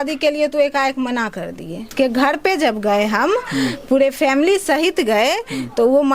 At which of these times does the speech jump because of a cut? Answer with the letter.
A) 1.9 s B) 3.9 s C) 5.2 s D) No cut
A